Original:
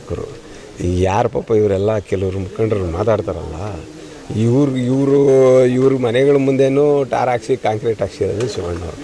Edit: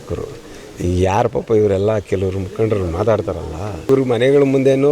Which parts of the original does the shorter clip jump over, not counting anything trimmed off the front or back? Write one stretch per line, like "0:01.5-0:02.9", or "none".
0:03.9-0:05.8